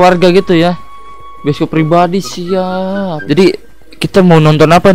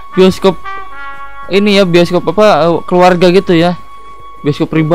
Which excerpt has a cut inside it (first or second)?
first